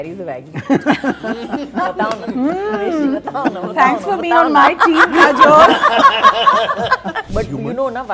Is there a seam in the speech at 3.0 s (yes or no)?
no